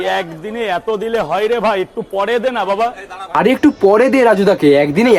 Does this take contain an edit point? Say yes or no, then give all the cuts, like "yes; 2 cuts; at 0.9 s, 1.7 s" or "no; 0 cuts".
no; 0 cuts